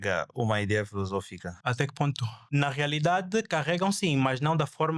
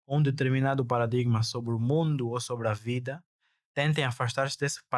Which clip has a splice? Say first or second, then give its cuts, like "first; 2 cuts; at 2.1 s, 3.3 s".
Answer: first; 2 cuts; at 1.4 s, 2.3 s